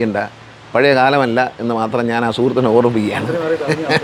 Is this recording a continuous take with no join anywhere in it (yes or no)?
yes